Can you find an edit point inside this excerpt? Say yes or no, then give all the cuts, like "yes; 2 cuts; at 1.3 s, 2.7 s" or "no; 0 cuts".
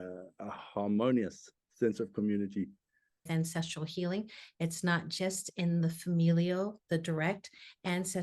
yes; 1 cut; at 3.3 s